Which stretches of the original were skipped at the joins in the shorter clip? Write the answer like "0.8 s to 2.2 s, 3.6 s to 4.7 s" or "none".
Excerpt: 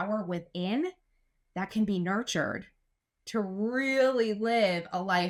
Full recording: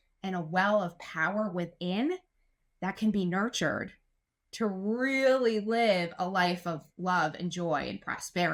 none